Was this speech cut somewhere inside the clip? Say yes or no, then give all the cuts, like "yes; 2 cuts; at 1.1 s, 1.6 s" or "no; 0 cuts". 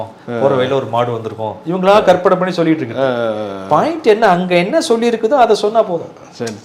no; 0 cuts